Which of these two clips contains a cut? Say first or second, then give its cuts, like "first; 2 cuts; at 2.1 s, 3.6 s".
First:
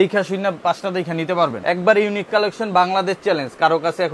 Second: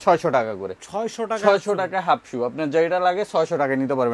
first; 1 cut; at 1.6 s